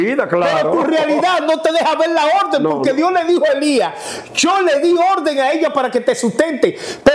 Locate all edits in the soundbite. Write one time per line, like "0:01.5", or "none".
none